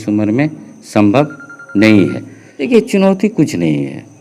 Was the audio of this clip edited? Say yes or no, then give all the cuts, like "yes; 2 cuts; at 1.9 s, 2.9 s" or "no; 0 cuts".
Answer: yes; 1 cut; at 2.5 s